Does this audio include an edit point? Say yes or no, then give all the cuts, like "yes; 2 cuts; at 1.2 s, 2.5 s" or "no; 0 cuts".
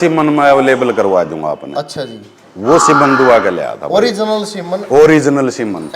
no; 0 cuts